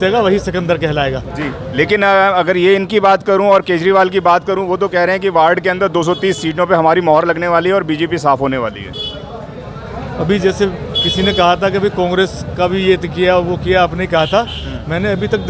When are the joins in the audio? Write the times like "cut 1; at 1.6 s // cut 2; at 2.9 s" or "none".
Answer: none